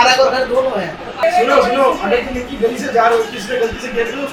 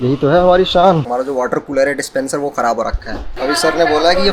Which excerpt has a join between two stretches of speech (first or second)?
second